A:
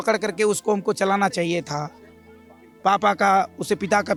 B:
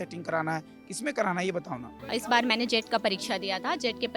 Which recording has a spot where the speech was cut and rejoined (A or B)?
B